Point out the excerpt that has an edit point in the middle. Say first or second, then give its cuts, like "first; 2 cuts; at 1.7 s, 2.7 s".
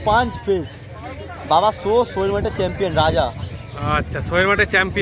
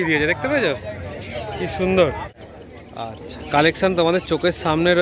second; 1 cut; at 2.3 s